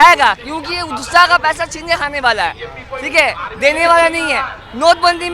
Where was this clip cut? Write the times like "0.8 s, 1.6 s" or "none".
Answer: none